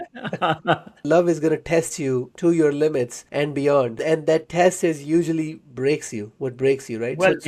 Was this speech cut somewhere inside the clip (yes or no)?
yes